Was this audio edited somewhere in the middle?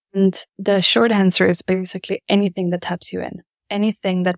no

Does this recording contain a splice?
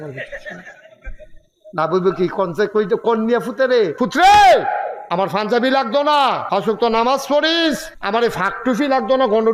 yes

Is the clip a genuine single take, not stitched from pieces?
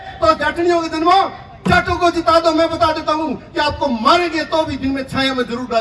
yes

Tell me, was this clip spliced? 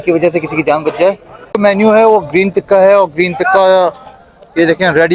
yes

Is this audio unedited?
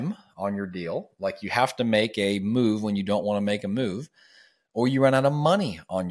yes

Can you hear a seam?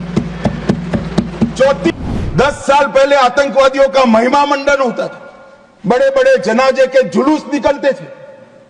yes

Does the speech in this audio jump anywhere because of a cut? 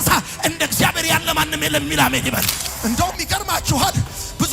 yes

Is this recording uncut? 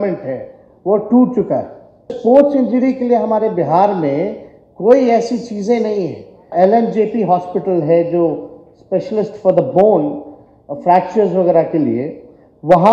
no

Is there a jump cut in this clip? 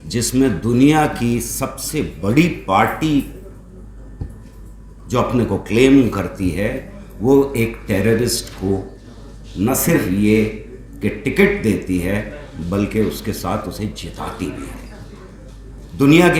no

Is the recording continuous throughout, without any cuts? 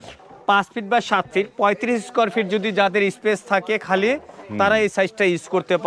yes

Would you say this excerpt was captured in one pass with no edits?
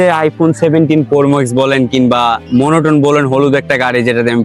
no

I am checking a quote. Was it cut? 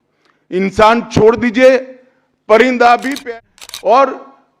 yes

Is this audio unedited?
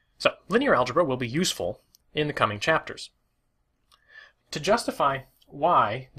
no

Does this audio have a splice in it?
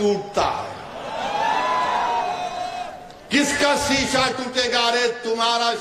no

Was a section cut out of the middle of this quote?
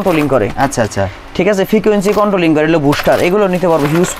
no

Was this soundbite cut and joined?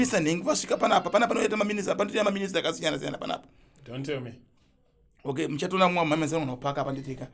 no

